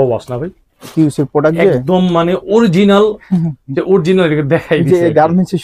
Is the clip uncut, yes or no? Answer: yes